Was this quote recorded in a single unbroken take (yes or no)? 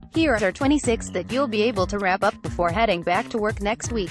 yes